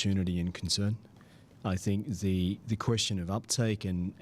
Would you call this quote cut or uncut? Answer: uncut